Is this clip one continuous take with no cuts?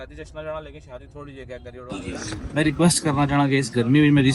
no; 1 cut; at 2.0 s

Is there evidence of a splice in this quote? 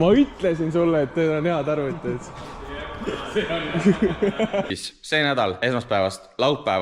yes; 2 cuts; at 4.7 s, 5.6 s

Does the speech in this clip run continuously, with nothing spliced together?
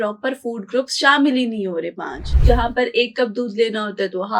no; 1 cut; at 2.3 s

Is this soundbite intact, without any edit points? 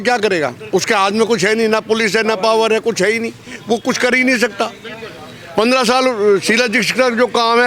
yes; 0 cuts

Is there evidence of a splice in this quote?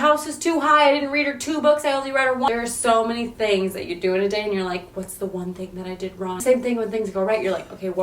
yes; 2 cuts; at 2.5 s, 6.4 s

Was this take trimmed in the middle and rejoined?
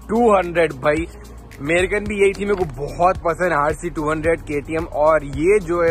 no; 0 cuts

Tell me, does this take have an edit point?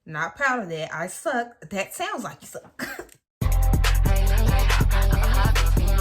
yes; 1 cut; at 3.2 s

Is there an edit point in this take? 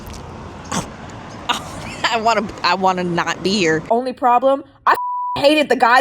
yes; 1 cut; at 3.8 s

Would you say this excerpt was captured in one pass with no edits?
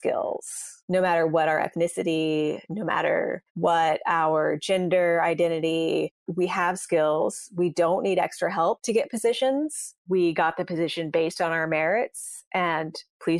yes; 0 cuts

